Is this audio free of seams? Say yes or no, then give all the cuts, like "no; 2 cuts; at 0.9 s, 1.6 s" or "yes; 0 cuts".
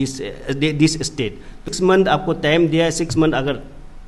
no; 1 cut; at 1.6 s